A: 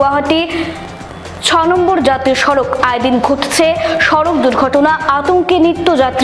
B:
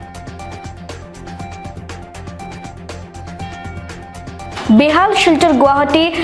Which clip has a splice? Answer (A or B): B